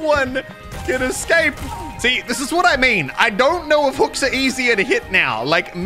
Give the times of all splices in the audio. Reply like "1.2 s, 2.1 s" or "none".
1.9 s